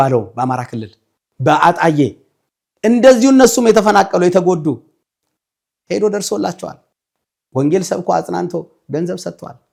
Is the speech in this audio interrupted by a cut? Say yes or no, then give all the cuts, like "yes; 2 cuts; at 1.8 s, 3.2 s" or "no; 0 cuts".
no; 0 cuts